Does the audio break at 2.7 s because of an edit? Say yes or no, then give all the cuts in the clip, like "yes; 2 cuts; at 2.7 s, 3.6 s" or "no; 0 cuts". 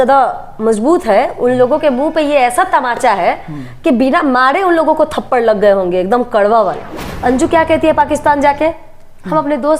no; 1 cut; at 7.1 s